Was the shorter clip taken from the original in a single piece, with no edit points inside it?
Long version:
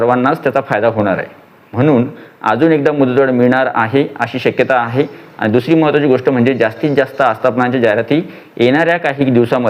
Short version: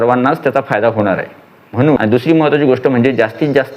no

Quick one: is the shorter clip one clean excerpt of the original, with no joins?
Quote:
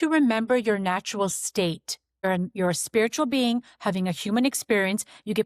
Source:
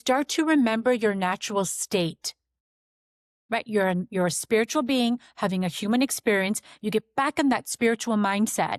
no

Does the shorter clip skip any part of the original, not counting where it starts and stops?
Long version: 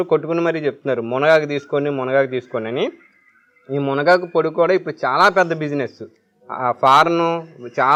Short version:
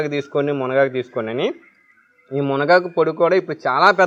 no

